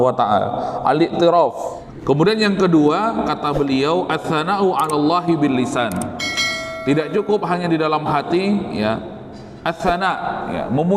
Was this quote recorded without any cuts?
no; 1 cut; at 1.6 s

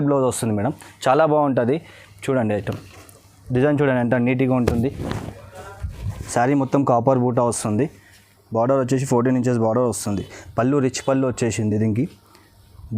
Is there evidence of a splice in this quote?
yes; 1 cut; at 6.1 s

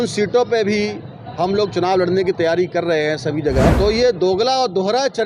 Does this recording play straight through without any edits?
no; 1 cut; at 3.7 s

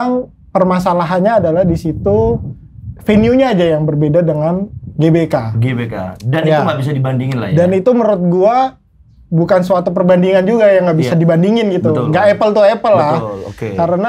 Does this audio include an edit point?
no; 0 cuts

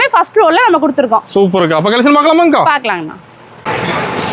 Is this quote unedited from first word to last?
yes; 0 cuts

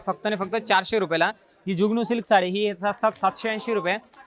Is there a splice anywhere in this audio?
no; 0 cuts

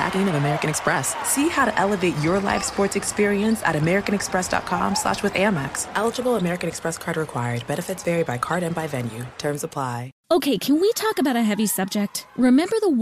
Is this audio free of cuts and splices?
no; 1 cut; at 10.1 s

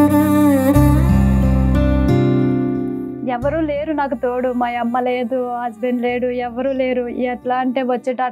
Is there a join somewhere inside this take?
yes; 1 cut; at 3.2 s

